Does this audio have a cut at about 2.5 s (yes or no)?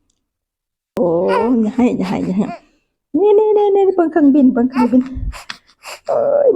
no